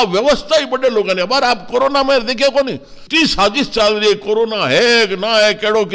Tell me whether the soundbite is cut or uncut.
uncut